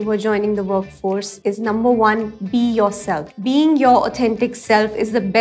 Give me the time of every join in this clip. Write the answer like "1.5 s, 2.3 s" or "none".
1.3 s, 3.3 s

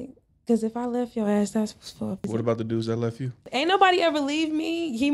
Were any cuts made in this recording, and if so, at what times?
2.2 s, 3.4 s

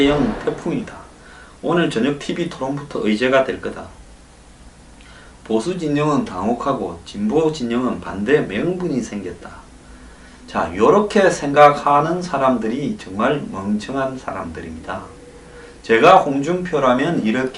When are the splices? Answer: 7.7 s

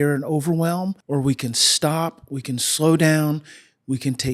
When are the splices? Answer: 1.0 s

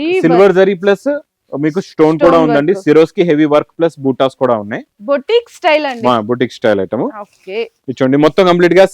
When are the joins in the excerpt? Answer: none

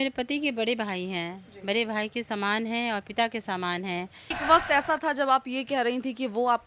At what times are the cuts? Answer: 4.2 s

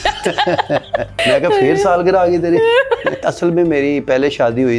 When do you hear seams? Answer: 1.1 s, 3.2 s

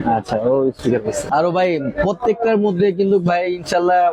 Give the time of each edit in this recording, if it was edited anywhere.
1.3 s

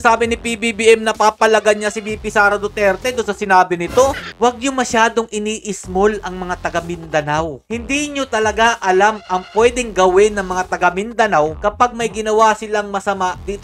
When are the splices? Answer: 4.3 s

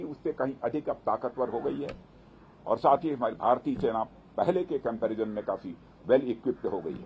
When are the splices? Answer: none

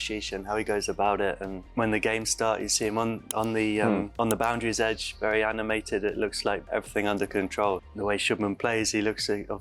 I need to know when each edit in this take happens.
1.5 s, 4.1 s, 6.6 s, 7.8 s

